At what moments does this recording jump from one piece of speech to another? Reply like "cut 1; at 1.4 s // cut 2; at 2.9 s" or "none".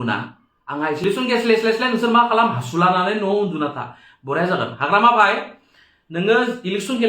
cut 1; at 1.0 s